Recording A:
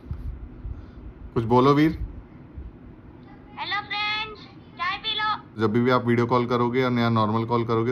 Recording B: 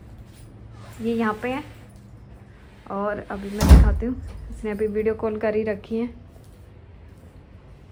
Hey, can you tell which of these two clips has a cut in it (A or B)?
A